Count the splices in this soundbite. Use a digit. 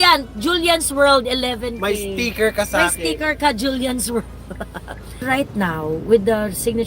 1